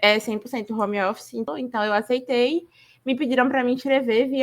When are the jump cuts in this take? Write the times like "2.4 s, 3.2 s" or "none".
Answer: 1.5 s